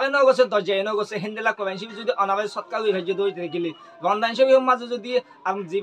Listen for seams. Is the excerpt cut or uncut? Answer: uncut